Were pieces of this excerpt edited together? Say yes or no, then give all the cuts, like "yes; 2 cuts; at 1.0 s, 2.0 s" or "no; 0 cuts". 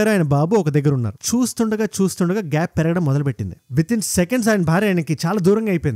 no; 0 cuts